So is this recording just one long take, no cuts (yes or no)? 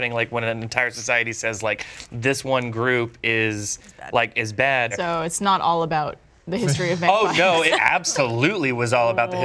no